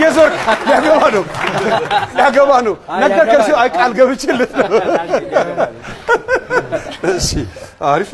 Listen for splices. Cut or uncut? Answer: uncut